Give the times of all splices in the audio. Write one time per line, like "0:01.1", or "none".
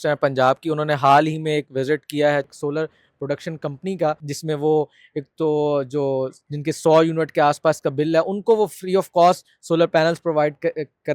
0:02.5
0:04.3